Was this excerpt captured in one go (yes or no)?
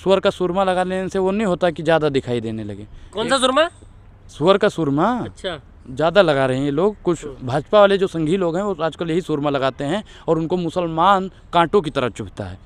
yes